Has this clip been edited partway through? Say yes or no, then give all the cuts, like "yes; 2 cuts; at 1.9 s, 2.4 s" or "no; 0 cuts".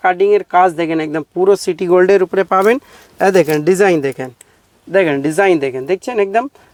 no; 0 cuts